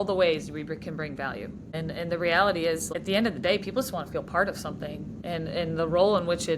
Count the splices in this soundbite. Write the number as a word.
three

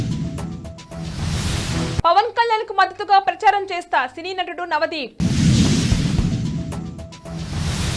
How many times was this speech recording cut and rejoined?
zero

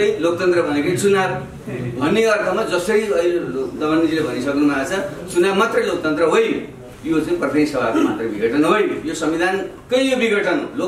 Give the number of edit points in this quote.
one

